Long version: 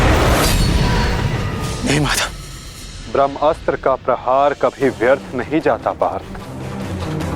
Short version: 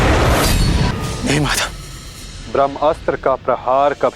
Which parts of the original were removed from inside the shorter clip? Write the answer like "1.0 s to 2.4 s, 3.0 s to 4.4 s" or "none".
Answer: 0.9 s to 1.5 s